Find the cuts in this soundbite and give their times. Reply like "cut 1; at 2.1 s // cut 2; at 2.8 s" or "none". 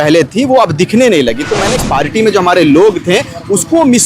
cut 1; at 1.8 s